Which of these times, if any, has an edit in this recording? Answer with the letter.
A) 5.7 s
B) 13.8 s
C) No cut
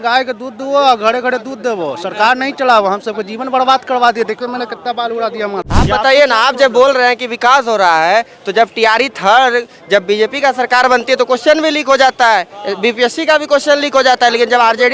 A